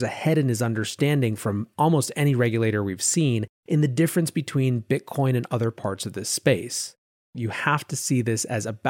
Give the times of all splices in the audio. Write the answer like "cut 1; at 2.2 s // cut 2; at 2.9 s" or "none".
cut 1; at 7.4 s